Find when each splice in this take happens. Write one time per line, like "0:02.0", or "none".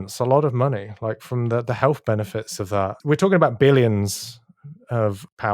0:03.0